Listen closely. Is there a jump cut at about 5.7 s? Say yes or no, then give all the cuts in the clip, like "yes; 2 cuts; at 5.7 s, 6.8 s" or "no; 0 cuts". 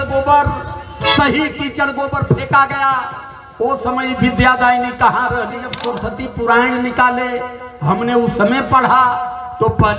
yes; 1 cut; at 5.7 s